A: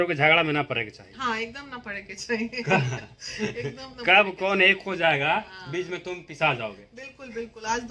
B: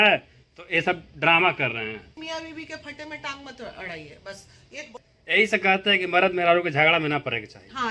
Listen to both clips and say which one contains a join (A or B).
B